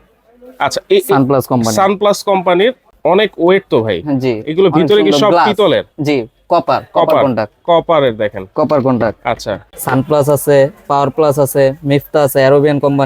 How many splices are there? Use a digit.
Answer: 2